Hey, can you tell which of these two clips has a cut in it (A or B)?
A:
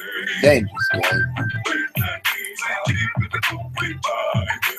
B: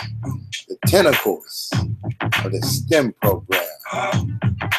A